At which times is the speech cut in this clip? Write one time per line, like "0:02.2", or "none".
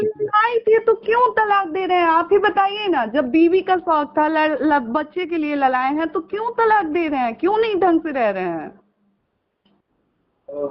none

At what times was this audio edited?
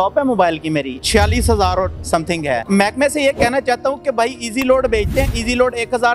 0:01.0
0:02.6

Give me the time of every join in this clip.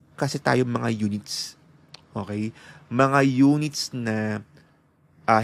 none

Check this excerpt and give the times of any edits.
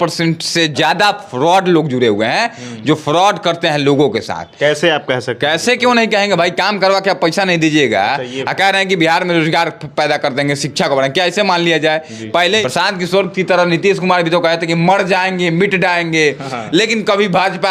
0:12.6

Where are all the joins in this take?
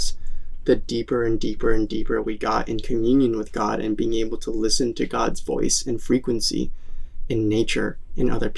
none

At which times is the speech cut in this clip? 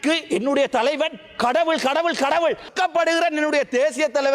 0:02.7

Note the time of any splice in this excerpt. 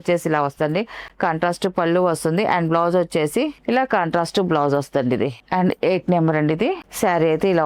none

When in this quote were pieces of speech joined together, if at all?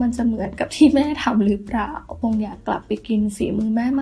0:02.2

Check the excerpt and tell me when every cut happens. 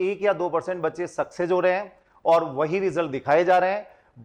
none

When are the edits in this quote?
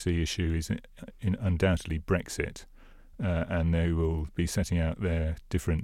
none

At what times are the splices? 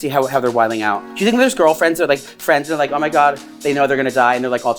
0:03.5

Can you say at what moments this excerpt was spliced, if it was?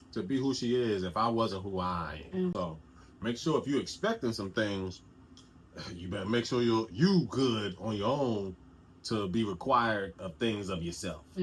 0:02.5

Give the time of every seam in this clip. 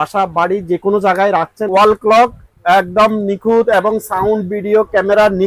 0:01.6

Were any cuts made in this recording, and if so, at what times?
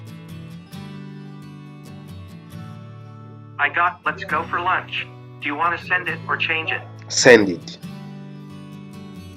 none

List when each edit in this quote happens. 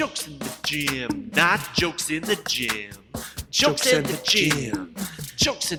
none

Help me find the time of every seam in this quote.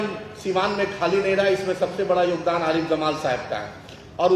none

